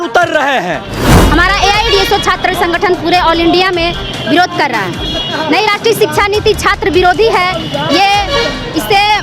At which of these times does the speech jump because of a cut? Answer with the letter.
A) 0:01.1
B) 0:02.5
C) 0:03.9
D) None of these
A